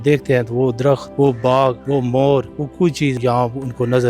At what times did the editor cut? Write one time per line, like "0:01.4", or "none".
0:01.1
0:01.8
0:03.0